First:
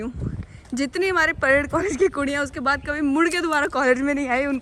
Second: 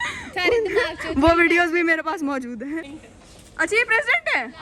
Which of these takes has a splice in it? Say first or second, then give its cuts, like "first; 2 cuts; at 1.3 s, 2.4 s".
second; 1 cut; at 2.9 s